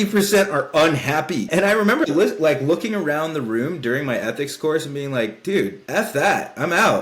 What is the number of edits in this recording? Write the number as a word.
two